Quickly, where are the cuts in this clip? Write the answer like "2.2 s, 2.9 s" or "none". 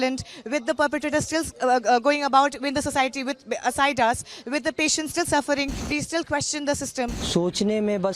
5.8 s, 7.2 s